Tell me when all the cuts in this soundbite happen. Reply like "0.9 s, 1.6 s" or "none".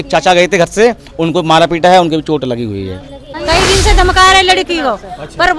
3.2 s